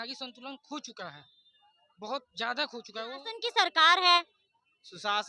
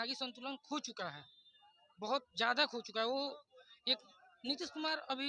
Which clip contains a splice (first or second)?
first